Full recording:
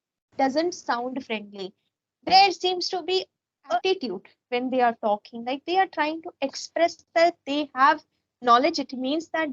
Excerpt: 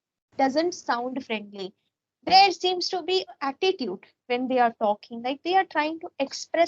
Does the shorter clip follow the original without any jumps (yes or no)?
no